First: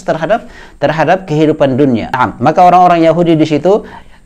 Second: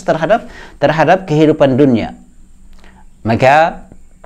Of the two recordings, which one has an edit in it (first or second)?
first